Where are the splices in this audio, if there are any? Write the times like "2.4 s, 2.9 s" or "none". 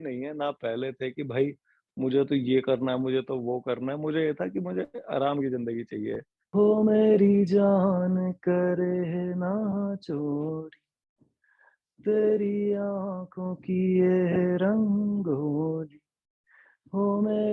6.3 s